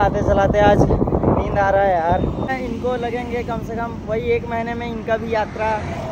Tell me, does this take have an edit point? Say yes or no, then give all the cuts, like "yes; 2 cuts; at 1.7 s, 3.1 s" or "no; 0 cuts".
yes; 1 cut; at 2.5 s